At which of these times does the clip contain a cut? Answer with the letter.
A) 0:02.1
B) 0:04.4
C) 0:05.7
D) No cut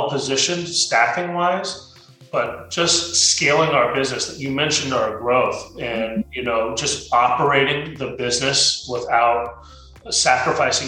D